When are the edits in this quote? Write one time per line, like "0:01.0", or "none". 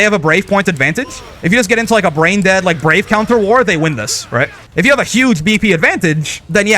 0:04.6